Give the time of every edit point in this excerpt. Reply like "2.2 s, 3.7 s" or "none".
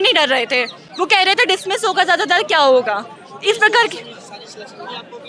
none